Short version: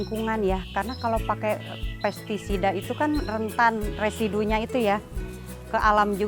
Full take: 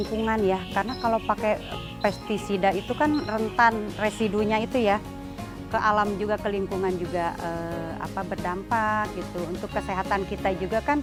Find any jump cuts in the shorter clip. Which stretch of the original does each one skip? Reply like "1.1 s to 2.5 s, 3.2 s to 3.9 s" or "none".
none